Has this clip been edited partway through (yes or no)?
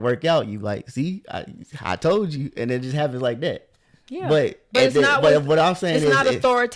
no